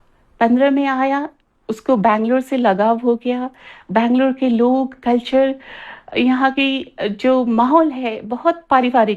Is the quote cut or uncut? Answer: uncut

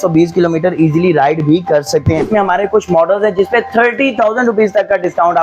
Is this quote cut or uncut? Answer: cut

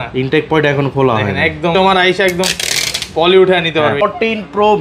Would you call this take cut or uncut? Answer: cut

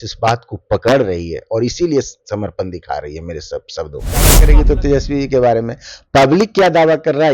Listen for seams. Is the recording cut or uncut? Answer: cut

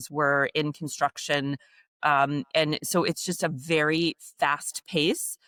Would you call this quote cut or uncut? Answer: uncut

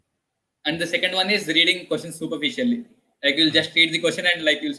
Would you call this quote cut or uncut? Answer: uncut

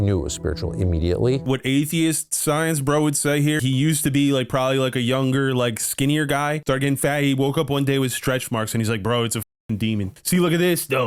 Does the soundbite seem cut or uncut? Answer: cut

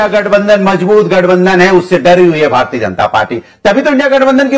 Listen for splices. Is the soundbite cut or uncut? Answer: uncut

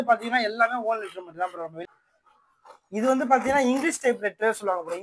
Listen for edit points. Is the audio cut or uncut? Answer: cut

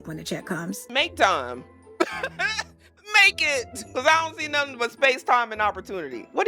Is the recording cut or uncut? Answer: uncut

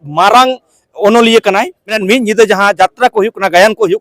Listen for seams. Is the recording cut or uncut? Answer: cut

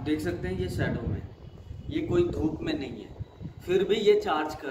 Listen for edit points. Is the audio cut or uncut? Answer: uncut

